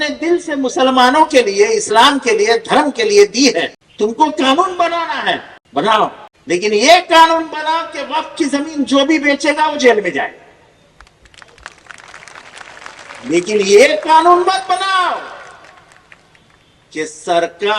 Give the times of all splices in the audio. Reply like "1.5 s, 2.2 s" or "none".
3.8 s, 5.6 s, 6.3 s